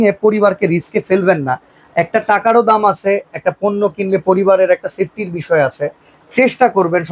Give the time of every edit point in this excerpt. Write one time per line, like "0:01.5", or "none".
none